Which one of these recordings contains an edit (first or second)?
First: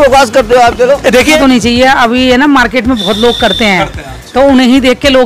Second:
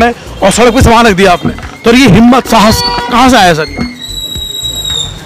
first